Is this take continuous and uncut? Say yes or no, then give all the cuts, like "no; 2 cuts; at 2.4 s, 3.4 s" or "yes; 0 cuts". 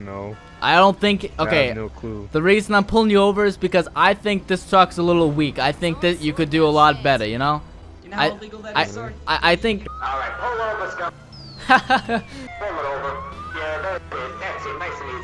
no; 3 cuts; at 9.8 s, 12.4 s, 13.4 s